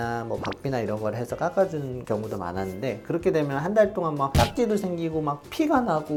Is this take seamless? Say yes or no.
yes